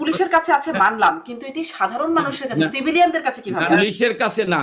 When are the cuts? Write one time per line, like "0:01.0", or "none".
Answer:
0:03.7